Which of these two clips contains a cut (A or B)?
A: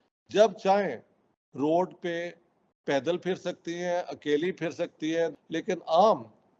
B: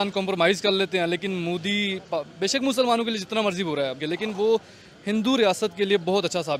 A